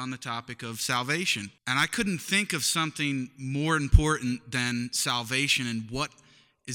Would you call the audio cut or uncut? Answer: cut